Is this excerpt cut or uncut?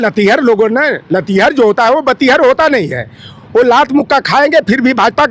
uncut